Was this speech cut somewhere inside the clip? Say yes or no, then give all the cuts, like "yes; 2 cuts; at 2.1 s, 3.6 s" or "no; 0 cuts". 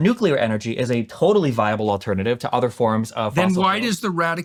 no; 0 cuts